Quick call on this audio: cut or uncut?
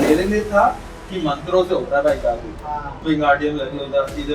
cut